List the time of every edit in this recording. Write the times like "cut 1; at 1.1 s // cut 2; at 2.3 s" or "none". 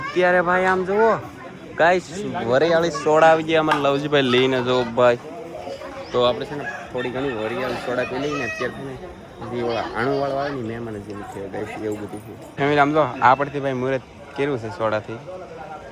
none